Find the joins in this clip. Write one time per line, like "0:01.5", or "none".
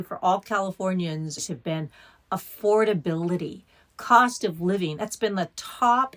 0:01.4